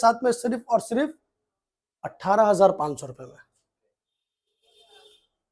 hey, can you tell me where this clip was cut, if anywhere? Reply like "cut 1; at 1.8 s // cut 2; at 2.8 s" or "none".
none